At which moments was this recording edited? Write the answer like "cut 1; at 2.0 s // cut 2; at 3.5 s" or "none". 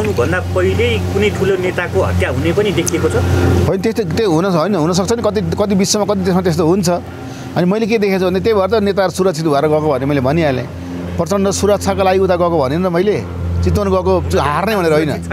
none